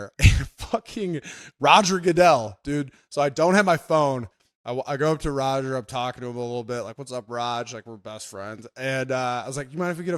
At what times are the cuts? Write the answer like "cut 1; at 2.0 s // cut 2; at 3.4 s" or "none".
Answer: none